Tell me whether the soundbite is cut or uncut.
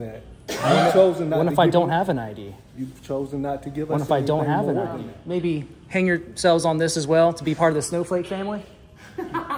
cut